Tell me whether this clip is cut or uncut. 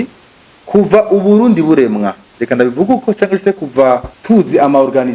uncut